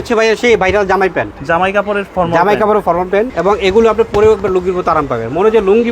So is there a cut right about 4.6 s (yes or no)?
no